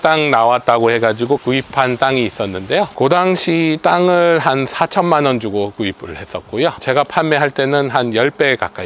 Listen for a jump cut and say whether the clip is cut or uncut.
cut